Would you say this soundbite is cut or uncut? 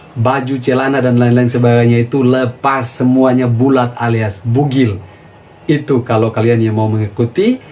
uncut